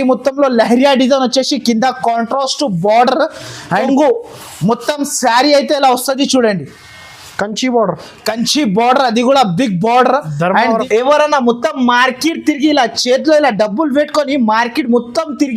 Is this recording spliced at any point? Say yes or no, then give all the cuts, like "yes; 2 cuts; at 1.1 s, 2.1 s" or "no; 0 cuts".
yes; 2 cuts; at 3.9 s, 10.8 s